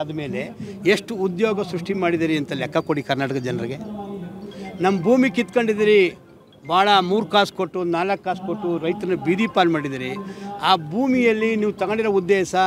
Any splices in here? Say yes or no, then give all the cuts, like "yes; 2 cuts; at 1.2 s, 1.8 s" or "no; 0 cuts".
no; 0 cuts